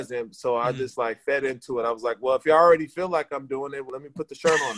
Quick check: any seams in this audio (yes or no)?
yes